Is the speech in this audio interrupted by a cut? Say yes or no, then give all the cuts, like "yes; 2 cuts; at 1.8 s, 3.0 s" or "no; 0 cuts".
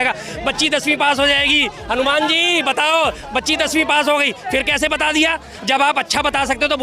yes; 1 cut; at 5.7 s